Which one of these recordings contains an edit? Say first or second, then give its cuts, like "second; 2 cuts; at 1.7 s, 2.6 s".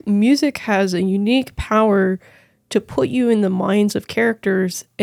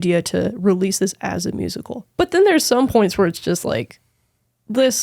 second; 1 cut; at 2.0 s